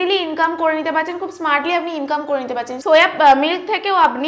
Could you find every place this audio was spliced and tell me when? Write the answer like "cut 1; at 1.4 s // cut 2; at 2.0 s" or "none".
cut 1; at 2.7 s